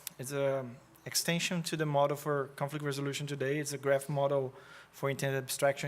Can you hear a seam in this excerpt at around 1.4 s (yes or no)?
no